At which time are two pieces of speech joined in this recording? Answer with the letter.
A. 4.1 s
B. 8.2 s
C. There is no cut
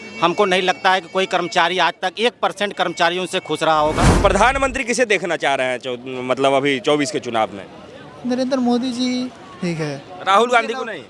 A